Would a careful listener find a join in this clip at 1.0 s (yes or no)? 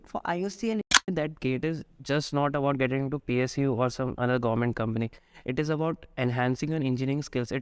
yes